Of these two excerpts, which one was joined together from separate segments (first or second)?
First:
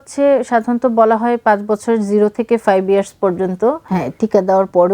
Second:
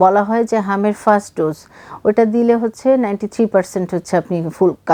first